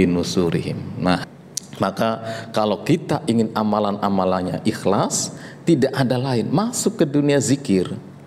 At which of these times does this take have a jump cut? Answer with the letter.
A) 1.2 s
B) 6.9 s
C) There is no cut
A